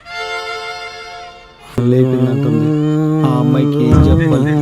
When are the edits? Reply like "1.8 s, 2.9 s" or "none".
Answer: 1.8 s